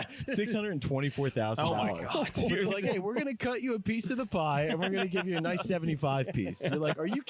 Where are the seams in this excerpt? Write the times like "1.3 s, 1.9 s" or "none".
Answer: none